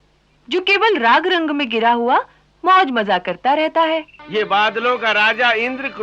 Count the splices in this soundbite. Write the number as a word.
one